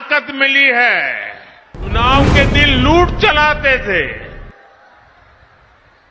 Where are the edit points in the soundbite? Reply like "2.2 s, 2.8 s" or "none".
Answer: 1.9 s